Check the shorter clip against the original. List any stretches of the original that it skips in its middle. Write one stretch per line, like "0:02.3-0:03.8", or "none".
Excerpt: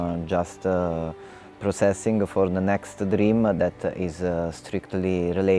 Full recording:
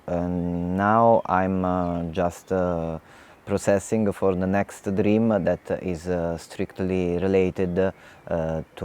none